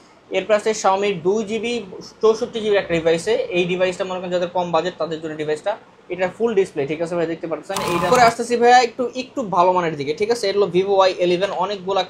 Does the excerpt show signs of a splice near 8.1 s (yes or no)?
yes